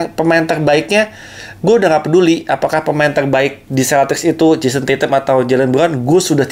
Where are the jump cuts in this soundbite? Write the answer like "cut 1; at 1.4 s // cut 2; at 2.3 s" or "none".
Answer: none